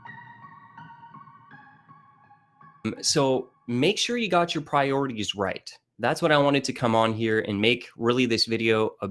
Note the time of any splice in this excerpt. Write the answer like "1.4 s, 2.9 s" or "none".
none